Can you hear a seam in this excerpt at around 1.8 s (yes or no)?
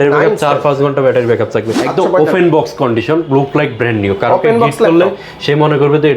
yes